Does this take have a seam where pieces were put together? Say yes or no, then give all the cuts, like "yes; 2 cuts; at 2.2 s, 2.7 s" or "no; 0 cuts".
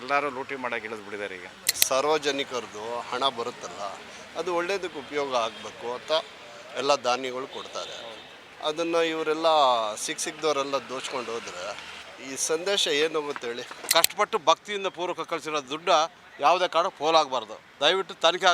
yes; 2 cuts; at 1.7 s, 13.9 s